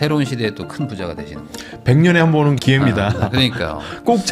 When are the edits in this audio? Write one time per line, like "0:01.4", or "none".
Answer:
0:02.6

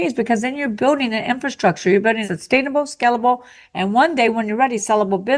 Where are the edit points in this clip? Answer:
0:02.3

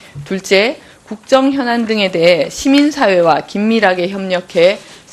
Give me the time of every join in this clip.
0:03.1

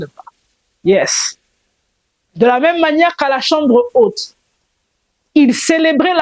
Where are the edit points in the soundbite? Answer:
none

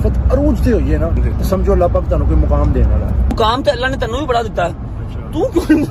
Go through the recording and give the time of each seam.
0:01.2
0:03.3

